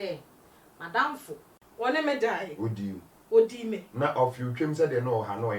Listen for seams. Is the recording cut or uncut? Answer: cut